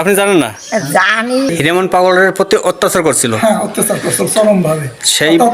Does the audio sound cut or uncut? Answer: cut